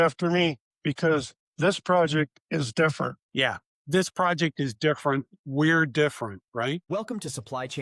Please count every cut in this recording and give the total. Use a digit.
1